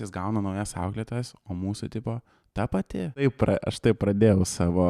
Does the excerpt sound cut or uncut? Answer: cut